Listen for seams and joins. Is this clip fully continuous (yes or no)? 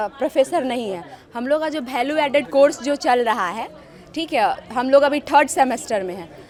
yes